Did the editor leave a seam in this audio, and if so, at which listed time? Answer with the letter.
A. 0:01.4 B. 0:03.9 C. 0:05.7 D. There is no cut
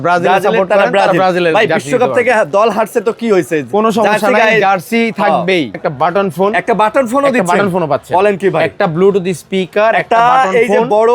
C